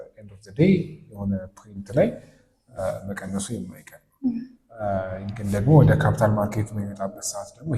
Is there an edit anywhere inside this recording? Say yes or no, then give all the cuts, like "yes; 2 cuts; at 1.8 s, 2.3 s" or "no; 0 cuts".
no; 0 cuts